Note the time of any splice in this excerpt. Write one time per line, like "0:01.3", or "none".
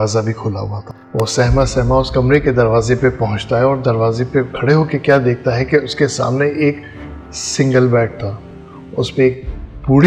none